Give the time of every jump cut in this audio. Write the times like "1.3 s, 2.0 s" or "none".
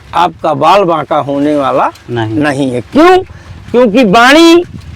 none